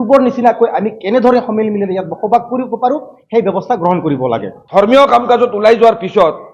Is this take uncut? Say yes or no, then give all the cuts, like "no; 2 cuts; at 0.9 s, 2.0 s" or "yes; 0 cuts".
no; 1 cut; at 4.6 s